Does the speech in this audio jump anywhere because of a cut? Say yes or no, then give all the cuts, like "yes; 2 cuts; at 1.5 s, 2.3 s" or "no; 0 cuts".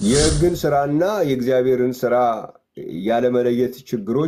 no; 0 cuts